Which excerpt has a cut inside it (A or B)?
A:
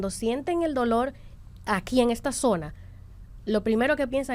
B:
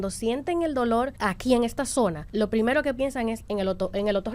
B